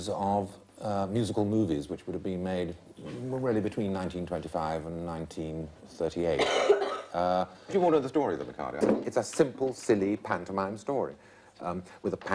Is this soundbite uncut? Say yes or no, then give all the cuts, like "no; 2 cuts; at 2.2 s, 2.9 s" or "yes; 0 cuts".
no; 1 cut; at 7.2 s